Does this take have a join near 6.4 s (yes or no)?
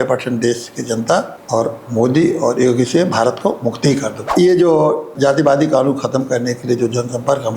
no